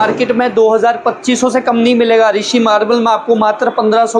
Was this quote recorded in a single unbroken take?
yes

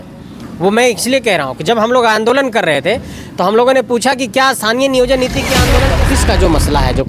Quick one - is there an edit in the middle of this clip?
yes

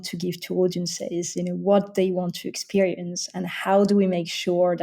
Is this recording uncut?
yes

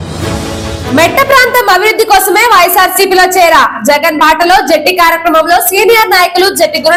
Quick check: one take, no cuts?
yes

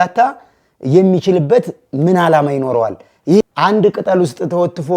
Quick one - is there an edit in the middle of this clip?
yes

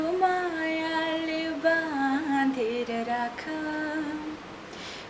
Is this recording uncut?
yes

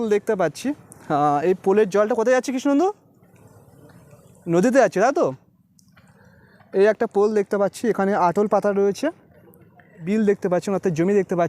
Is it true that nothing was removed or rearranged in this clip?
no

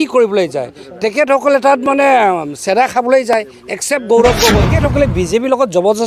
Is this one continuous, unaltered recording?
no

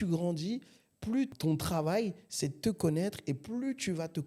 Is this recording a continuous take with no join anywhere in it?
yes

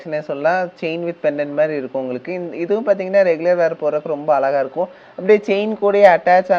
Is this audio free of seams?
yes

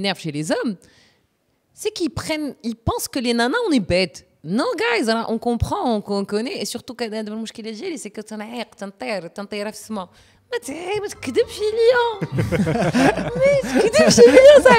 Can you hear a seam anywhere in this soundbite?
no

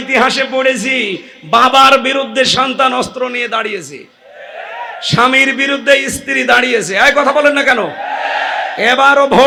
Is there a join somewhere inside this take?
no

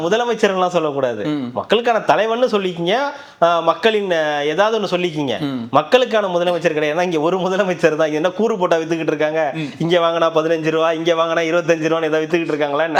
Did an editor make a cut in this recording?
no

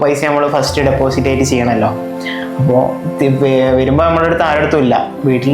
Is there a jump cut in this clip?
no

